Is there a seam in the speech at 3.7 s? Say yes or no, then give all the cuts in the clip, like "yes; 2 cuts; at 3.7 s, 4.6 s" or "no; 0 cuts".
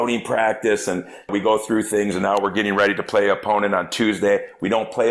no; 1 cut; at 1.3 s